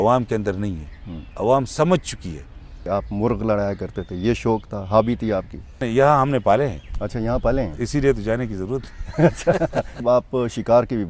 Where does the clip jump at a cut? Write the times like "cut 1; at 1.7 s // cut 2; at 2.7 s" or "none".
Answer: cut 1; at 2.8 s // cut 2; at 5.9 s // cut 3; at 10.0 s